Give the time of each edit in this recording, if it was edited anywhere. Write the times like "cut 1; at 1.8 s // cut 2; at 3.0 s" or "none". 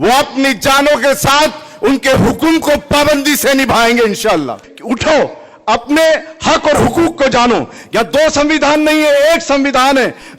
cut 1; at 4.7 s